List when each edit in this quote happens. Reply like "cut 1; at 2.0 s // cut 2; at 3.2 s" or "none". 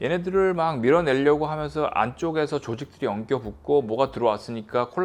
none